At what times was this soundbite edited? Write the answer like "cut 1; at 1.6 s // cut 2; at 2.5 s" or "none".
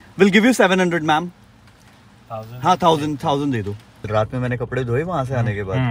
cut 1; at 4.1 s